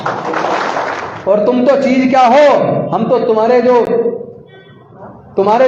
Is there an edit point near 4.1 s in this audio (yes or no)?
no